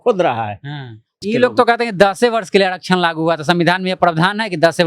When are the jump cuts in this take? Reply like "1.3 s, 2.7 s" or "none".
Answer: 1.2 s